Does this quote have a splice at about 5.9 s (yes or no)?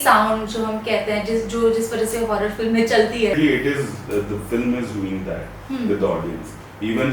no